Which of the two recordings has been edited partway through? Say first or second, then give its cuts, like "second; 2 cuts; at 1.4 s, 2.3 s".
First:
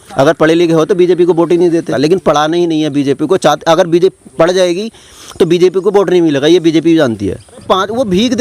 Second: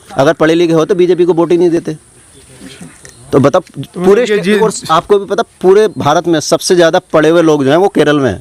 first; 2 cuts; at 1.9 s, 7.6 s